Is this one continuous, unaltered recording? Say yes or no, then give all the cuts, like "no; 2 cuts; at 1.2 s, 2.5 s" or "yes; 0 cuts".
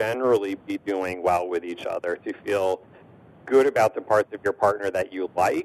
yes; 0 cuts